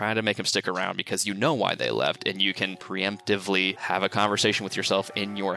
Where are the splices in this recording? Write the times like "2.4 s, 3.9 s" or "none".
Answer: 2.8 s, 3.8 s